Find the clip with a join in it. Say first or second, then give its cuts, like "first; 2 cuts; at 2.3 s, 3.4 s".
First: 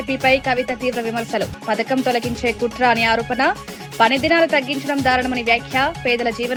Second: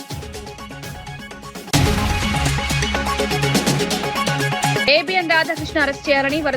second; 2 cuts; at 1.7 s, 4.8 s